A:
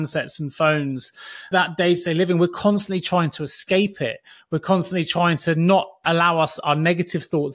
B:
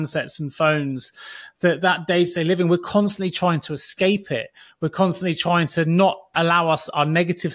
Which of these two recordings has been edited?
A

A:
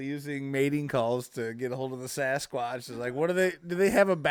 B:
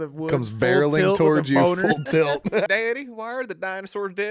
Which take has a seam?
B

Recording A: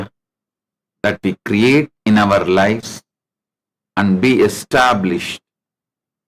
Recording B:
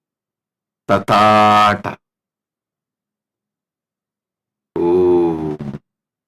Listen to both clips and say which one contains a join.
A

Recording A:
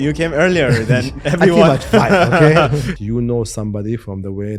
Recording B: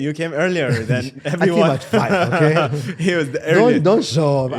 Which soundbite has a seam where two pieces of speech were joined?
A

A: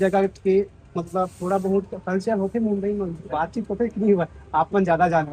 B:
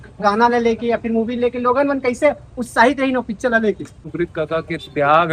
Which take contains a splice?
B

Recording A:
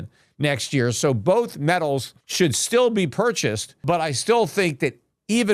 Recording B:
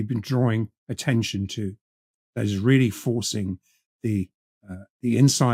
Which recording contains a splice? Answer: A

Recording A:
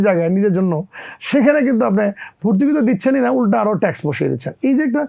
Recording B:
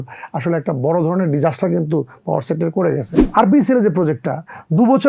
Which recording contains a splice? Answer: B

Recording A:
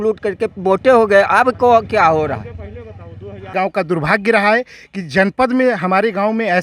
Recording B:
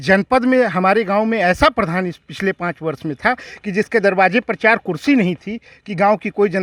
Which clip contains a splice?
A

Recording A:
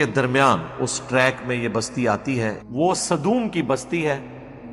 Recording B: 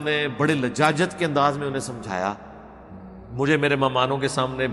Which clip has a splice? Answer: A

